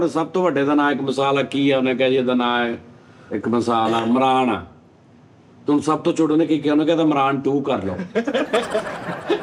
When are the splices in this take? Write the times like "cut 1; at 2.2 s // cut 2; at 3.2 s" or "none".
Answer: none